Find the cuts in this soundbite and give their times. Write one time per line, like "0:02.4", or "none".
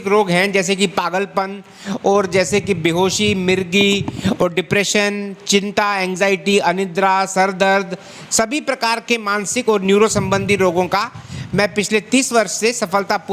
none